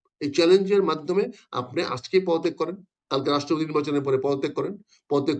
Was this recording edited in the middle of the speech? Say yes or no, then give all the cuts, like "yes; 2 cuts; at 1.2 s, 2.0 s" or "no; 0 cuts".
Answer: no; 0 cuts